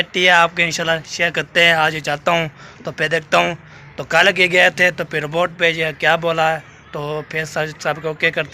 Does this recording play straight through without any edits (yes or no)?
yes